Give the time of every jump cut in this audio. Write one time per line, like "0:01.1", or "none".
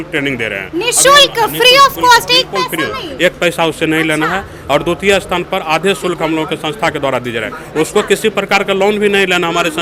none